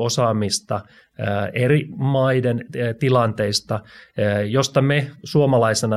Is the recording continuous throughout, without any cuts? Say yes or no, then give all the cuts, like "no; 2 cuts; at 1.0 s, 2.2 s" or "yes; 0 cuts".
yes; 0 cuts